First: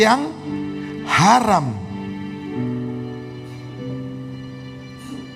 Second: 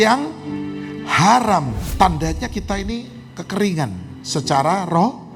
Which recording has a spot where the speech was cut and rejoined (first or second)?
second